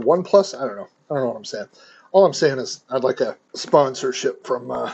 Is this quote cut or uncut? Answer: cut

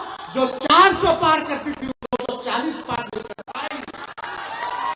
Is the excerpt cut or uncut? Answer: uncut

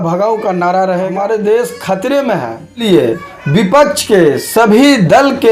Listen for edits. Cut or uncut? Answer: cut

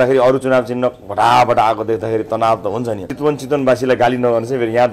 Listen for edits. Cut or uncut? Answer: cut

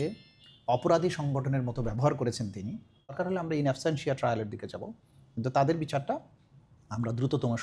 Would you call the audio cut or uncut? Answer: cut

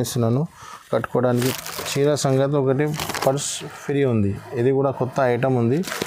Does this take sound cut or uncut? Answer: cut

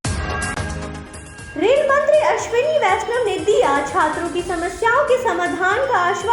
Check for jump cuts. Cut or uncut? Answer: cut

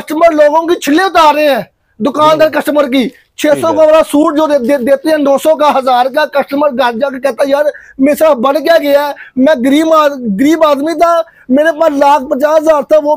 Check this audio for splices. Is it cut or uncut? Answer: uncut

